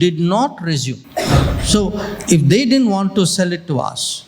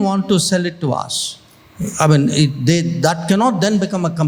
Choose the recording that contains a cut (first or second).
first